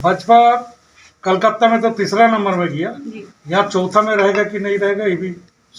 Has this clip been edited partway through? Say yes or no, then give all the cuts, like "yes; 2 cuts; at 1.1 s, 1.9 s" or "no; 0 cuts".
no; 0 cuts